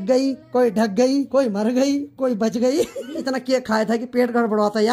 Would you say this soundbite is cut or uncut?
cut